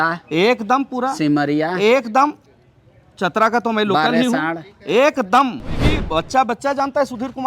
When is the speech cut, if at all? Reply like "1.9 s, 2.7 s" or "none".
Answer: 5.9 s